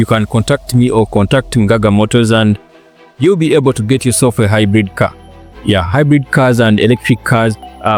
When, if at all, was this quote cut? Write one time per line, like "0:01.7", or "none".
none